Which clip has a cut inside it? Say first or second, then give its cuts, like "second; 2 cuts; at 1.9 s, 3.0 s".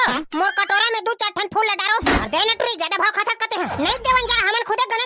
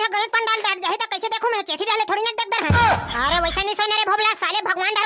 first; 2 cuts; at 2.2 s, 3.7 s